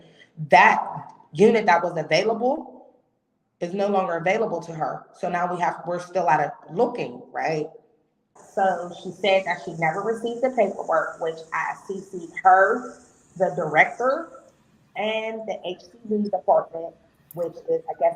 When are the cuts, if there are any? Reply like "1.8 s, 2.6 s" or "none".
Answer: 8.4 s